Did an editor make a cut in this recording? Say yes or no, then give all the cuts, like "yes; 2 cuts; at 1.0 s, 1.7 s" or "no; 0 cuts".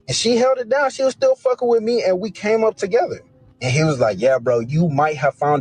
no; 0 cuts